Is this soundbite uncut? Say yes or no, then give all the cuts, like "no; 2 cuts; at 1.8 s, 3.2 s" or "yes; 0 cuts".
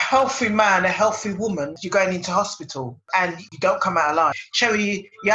no; 2 cuts; at 1.8 s, 4.5 s